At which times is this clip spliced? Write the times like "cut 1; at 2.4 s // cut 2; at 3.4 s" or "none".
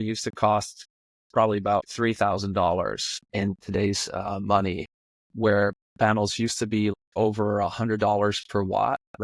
cut 1; at 1.9 s // cut 2; at 3.1 s // cut 3; at 5.3 s // cut 4; at 6.9 s